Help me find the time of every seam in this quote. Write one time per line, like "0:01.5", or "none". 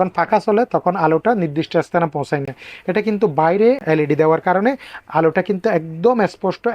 0:03.8